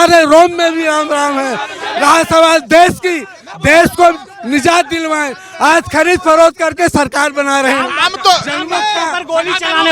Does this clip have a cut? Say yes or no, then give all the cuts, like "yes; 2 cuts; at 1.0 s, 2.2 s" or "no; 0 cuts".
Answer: no; 0 cuts